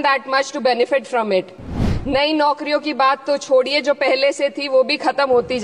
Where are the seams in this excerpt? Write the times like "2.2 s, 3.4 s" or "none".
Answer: 1.8 s

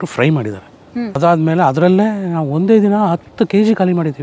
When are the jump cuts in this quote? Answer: 1.2 s

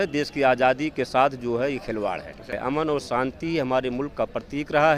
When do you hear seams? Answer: 2.5 s

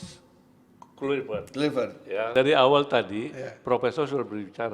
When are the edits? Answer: 2.3 s

